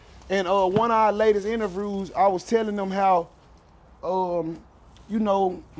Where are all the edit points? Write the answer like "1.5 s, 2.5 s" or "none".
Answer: none